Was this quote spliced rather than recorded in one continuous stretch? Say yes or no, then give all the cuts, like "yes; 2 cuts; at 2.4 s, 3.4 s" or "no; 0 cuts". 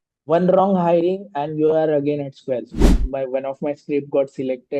yes; 1 cut; at 3.0 s